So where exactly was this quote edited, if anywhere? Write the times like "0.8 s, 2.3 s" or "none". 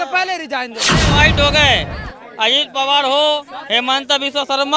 0.9 s